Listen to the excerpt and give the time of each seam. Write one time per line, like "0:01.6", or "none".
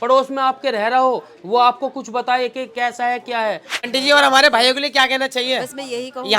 0:03.9